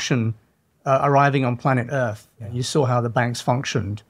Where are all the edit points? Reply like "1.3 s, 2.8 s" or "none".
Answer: none